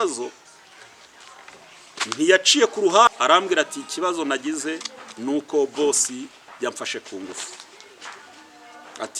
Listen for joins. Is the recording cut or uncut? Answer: cut